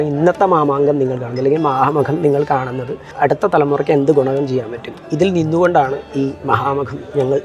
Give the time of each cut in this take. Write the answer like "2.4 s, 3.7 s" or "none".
3.1 s